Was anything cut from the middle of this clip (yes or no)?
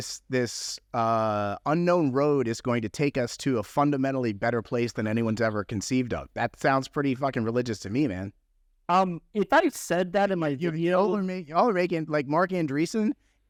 no